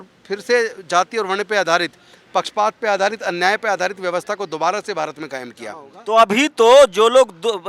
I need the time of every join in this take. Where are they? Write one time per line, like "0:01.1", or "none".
0:06.0